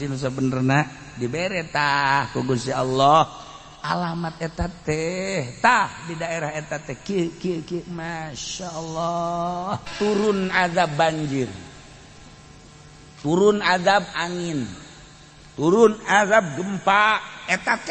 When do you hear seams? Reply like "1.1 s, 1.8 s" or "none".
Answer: 9.9 s